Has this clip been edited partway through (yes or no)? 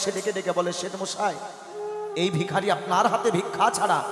no